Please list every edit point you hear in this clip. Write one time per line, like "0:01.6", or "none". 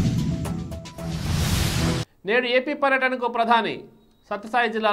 0:02.1